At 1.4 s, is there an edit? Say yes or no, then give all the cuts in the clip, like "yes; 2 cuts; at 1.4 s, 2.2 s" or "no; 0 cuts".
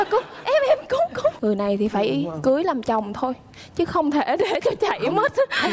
yes; 1 cut; at 1.4 s